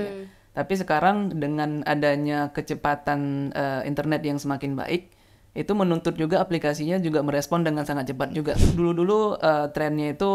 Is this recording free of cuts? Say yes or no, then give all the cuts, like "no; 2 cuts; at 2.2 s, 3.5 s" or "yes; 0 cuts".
no; 1 cut; at 8.5 s